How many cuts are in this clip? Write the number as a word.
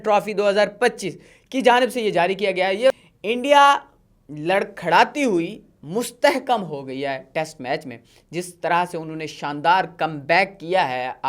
one